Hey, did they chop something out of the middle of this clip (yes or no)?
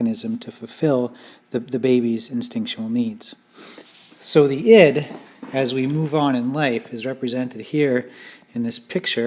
no